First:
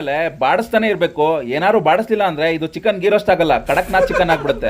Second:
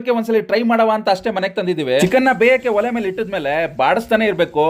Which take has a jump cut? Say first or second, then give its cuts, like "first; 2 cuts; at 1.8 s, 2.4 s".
second; 1 cut; at 2.0 s